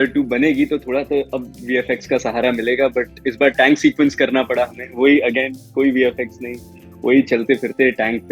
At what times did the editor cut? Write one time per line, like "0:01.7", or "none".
none